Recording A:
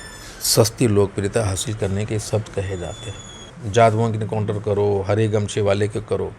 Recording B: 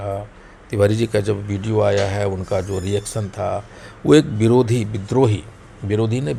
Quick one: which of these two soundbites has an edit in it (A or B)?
A